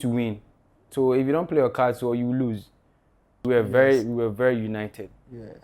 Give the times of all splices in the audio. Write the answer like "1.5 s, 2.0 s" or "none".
3.4 s